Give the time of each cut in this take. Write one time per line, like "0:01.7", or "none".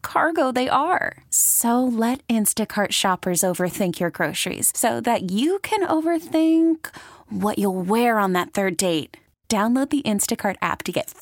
none